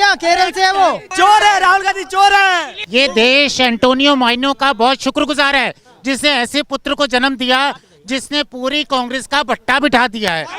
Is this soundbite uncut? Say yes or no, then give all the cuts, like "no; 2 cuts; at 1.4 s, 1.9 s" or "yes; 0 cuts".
no; 2 cuts; at 1.0 s, 2.7 s